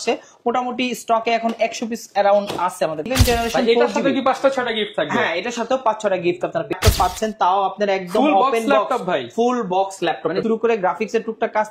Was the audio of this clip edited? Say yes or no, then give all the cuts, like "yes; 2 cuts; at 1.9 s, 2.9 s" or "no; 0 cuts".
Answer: yes; 3 cuts; at 3.1 s, 6.7 s, 10.4 s